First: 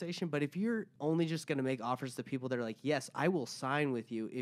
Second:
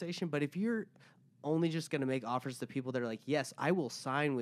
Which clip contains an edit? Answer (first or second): first